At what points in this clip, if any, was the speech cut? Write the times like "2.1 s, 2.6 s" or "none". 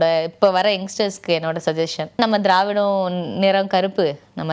2.2 s